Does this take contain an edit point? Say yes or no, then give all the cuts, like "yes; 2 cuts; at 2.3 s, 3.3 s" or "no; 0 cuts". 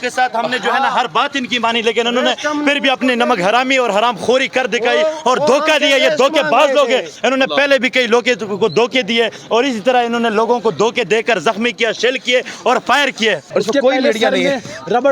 yes; 1 cut; at 13.4 s